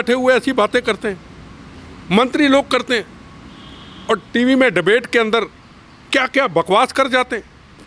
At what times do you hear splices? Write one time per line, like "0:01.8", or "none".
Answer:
none